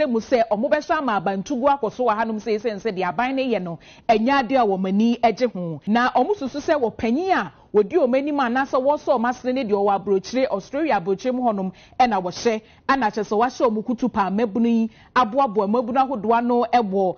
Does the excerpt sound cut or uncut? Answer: cut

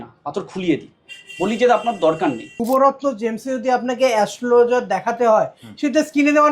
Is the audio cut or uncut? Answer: cut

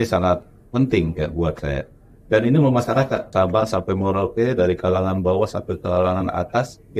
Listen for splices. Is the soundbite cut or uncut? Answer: cut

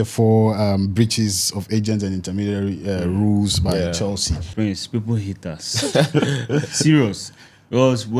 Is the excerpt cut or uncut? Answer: cut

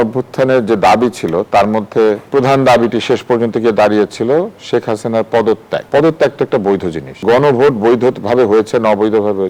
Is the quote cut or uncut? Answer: cut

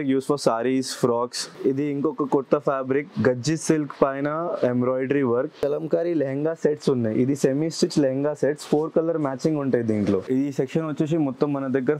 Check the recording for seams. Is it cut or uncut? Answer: cut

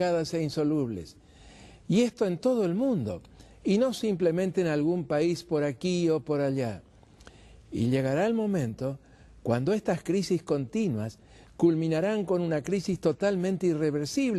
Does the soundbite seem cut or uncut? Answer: cut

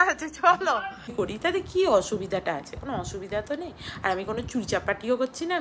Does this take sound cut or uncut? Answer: cut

